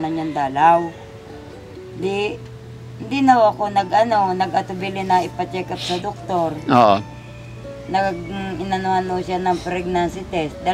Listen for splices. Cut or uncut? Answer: uncut